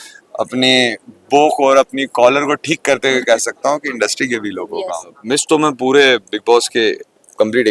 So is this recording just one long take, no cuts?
no; 1 cut; at 5.1 s

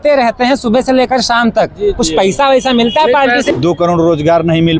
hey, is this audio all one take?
no; 1 cut; at 3.5 s

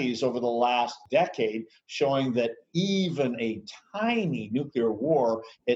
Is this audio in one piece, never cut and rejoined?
no; 1 cut; at 1.0 s

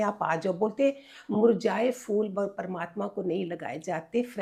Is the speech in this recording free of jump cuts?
yes; 0 cuts

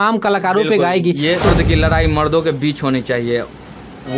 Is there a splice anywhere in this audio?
yes; 1 cut; at 1.4 s

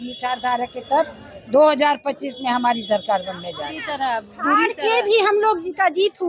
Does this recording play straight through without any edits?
no; 1 cut; at 4.3 s

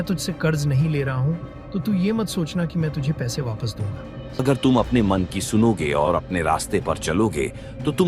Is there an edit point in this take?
yes; 1 cut; at 4.4 s

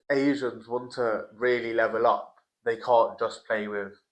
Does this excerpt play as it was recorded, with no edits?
yes; 0 cuts

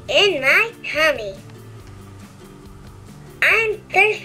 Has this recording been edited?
no; 0 cuts

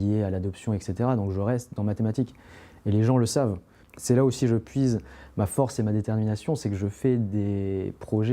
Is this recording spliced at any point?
yes; 1 cut; at 3.9 s

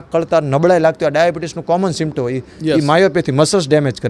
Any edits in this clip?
no; 0 cuts

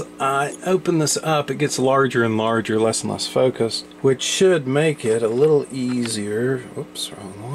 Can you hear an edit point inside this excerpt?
yes; 1 cut; at 3.9 s

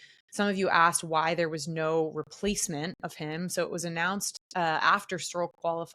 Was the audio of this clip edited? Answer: no; 0 cuts

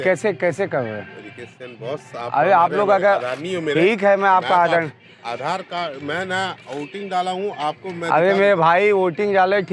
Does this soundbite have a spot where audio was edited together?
no; 0 cuts

